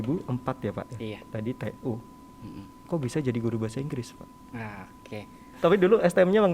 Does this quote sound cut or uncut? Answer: cut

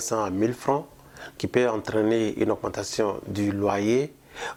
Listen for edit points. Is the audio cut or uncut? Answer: uncut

